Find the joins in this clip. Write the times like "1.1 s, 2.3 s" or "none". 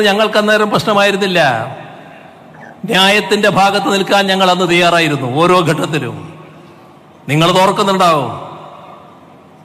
none